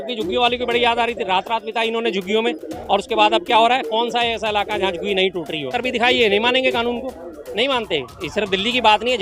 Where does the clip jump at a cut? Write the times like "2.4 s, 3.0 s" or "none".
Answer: 5.7 s